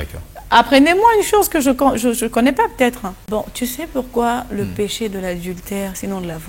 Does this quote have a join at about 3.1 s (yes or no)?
yes